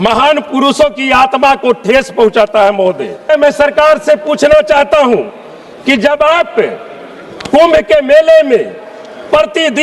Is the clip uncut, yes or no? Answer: no